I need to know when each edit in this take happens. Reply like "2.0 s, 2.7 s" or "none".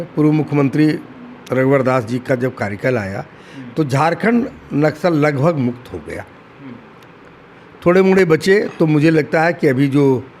none